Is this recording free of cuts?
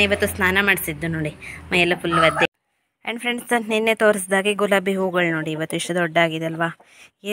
no; 1 cut; at 2.5 s

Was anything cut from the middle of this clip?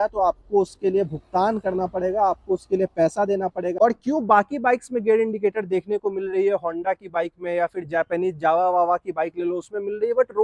yes; 1 cut; at 3.7 s

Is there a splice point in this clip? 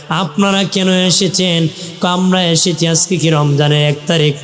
no; 0 cuts

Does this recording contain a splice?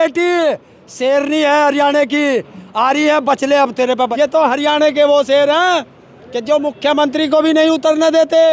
yes; 1 cut; at 4.1 s

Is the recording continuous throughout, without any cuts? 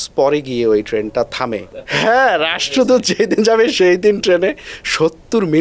no; 1 cut; at 1.8 s

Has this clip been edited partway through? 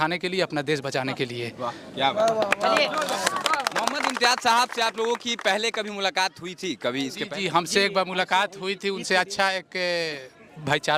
no; 0 cuts

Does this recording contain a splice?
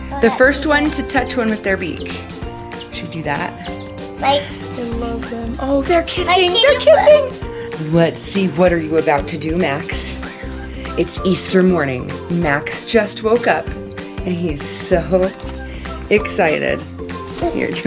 yes; 2 cuts; at 3.9 s, 7.7 s

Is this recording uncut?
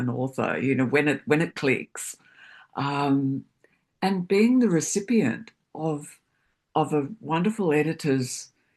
yes; 0 cuts

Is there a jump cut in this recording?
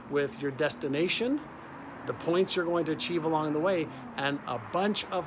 no; 0 cuts

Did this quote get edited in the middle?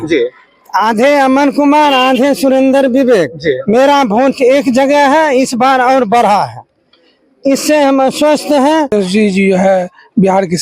yes; 1 cut; at 8.9 s

